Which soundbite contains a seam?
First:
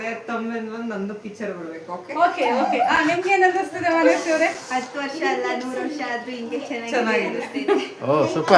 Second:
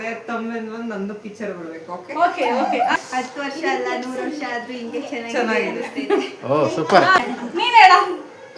second; 2 cuts; at 3.0 s, 7.3 s

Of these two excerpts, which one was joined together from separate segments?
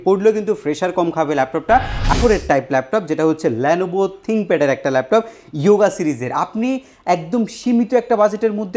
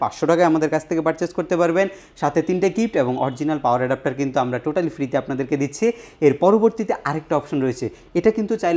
first; 1 cut; at 2.1 s

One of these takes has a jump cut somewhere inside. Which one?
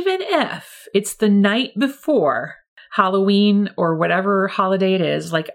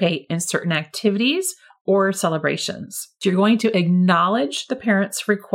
second; 1 cut; at 3.1 s

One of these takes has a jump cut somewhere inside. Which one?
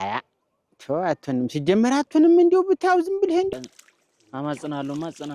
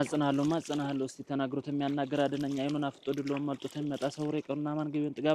first; 1 cut; at 3.5 s

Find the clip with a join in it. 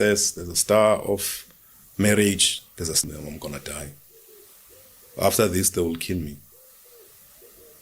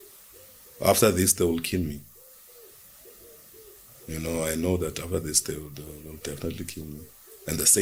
first; 1 cut; at 2.9 s

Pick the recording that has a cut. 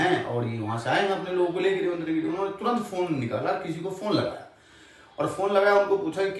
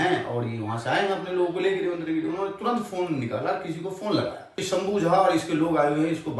second; 1 cut; at 4.6 s

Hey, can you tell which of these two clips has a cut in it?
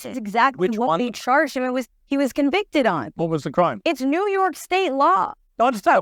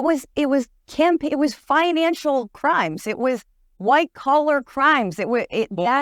first; 3 cuts; at 1.1 s, 3.1 s, 4.9 s

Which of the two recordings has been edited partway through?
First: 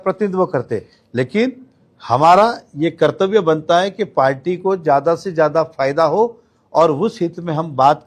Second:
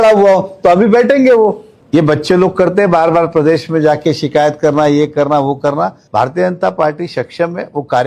second; 2 cuts; at 1.7 s, 6.0 s

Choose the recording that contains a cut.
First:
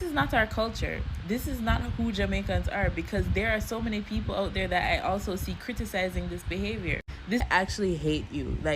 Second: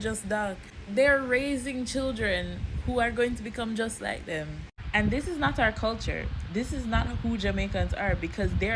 first; 1 cut; at 7.4 s

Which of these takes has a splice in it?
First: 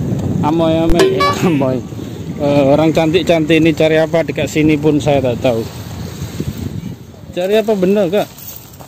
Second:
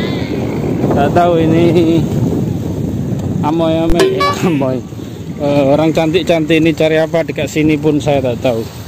first; 1 cut; at 6.9 s

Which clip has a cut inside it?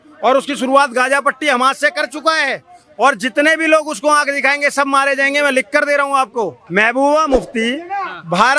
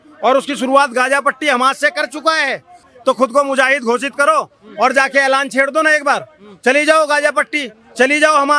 second; 1 cut; at 2.8 s

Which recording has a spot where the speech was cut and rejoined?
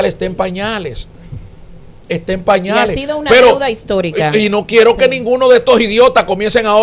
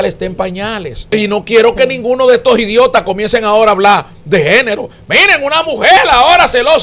second; 1 cut; at 1.1 s

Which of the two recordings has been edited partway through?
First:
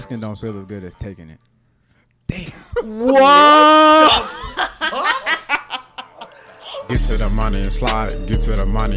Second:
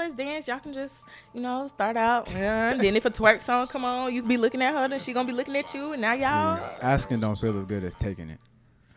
first; 1 cut; at 6.8 s

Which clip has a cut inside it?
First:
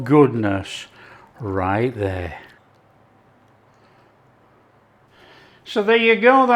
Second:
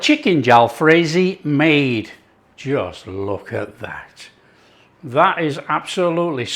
first; 2 cuts; at 2.6 s, 5.1 s

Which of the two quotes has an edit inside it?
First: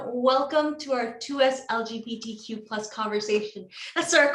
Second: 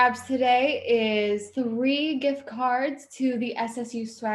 second; 1 cut; at 1.5 s

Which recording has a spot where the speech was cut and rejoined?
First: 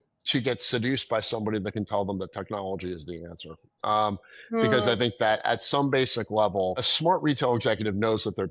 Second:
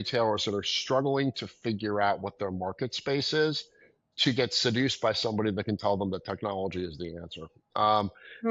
first; 1 cut; at 6.9 s

